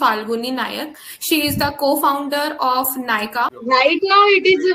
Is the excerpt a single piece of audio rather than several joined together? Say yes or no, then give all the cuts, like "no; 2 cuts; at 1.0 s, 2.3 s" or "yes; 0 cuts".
no; 1 cut; at 3.6 s